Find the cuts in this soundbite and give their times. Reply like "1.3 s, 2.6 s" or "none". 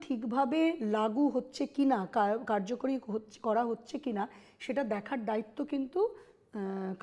none